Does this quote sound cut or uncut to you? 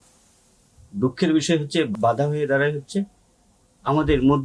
cut